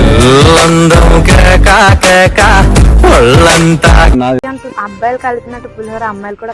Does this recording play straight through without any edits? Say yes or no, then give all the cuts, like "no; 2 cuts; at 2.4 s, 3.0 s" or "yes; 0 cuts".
no; 1 cut; at 4.4 s